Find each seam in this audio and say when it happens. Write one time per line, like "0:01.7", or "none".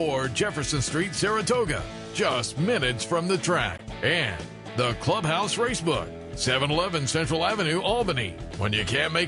none